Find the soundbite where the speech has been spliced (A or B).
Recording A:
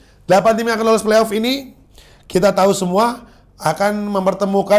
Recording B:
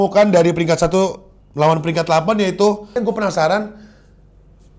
B